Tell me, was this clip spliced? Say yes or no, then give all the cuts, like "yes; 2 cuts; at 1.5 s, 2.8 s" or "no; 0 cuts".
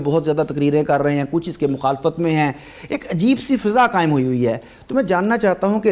no; 0 cuts